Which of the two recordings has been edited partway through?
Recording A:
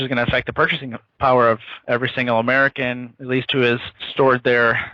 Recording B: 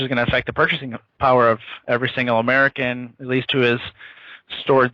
A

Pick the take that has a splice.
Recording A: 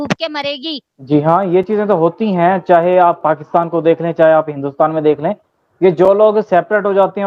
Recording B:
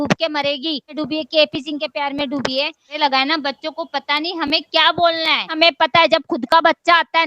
B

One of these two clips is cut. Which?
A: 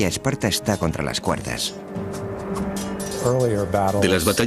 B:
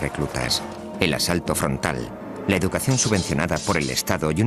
A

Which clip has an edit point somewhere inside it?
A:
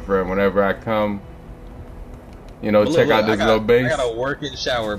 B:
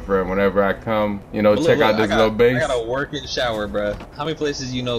B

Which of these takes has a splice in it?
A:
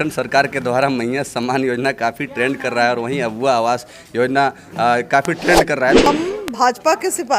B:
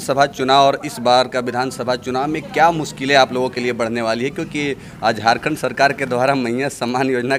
A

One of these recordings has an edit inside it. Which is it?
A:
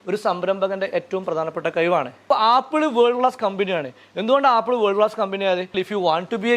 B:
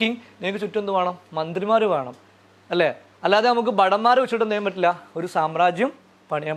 A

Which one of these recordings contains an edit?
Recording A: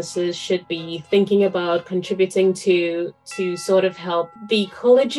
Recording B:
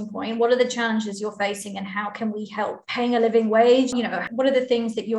B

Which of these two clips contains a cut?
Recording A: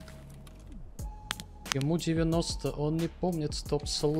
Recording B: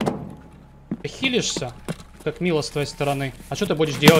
B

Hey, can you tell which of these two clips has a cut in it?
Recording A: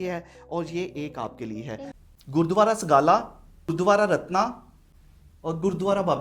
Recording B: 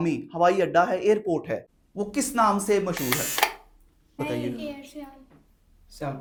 A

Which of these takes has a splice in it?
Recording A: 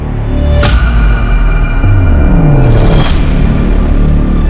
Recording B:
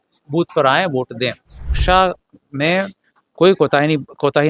B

